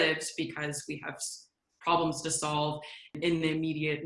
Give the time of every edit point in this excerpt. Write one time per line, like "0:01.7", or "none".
0:03.1

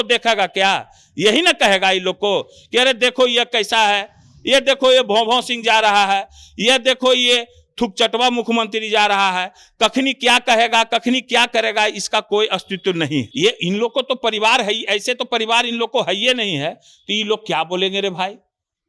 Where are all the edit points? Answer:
0:13.3

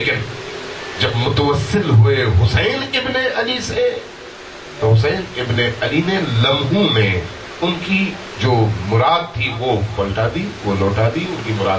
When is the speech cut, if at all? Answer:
none

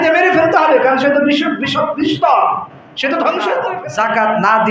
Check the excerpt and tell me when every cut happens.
0:03.8

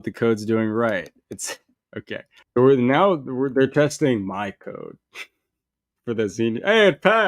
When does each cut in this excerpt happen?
0:02.4

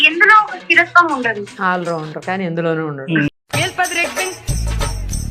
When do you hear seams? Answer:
0:01.5
0:03.3

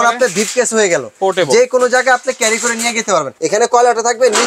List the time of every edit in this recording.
0:03.3

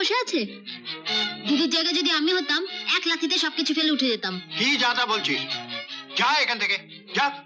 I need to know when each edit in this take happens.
none

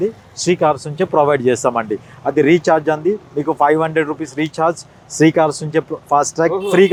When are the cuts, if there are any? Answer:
none

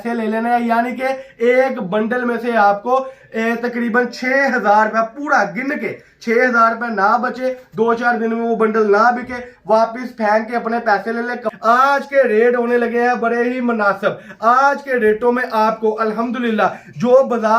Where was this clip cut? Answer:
0:11.5

